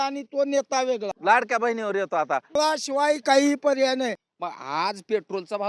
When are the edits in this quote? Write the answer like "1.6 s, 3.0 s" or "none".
1.1 s, 2.5 s, 4.2 s